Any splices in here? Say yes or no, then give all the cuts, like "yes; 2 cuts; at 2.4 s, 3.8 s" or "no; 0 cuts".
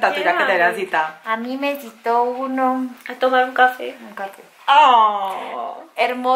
no; 0 cuts